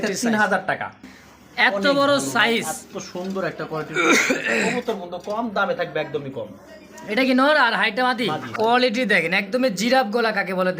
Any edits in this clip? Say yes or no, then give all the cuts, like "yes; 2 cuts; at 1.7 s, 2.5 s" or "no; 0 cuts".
yes; 2 cuts; at 1.2 s, 8.5 s